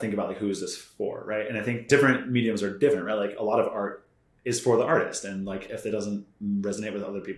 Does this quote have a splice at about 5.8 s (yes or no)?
no